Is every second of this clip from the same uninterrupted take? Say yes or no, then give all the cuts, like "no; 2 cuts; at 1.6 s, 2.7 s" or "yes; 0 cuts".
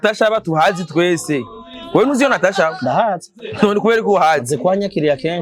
yes; 0 cuts